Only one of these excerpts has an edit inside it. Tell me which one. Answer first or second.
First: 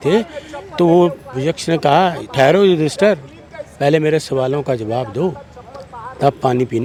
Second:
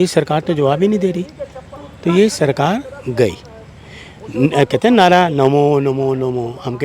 second